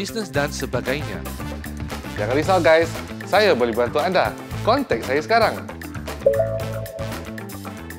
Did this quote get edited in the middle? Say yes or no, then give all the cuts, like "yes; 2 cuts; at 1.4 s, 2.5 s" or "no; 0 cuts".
yes; 1 cut; at 7.0 s